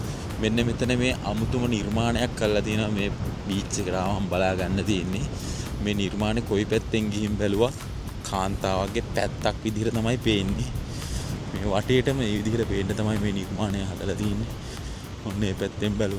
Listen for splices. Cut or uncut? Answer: uncut